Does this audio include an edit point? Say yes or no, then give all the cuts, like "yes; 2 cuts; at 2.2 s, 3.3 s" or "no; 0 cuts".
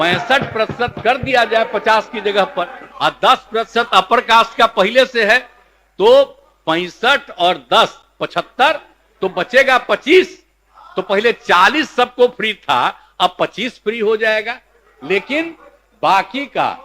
yes; 1 cut; at 2.8 s